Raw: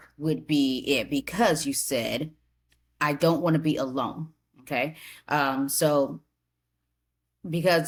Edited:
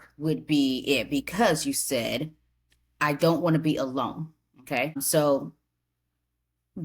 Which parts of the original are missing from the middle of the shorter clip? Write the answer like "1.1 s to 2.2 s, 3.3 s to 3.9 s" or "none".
5.0 s to 5.7 s